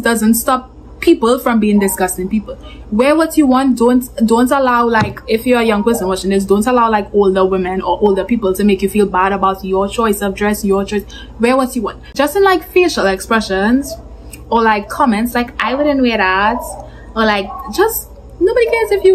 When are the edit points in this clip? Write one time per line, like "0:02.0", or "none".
none